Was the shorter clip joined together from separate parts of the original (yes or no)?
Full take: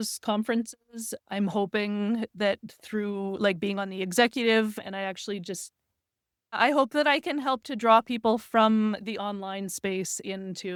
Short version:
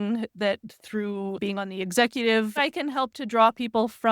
yes